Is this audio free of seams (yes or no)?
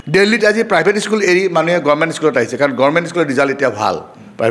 yes